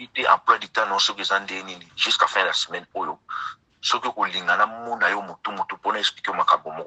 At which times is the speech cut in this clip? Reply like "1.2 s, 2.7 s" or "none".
none